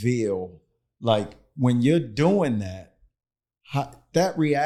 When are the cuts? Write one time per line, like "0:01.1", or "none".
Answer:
none